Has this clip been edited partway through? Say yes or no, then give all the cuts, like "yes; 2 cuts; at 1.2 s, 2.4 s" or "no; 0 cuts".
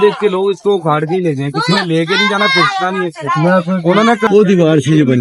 yes; 1 cut; at 4.3 s